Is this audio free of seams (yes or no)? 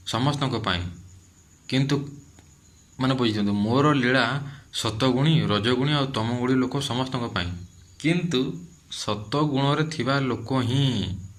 yes